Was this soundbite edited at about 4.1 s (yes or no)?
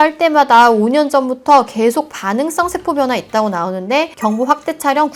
no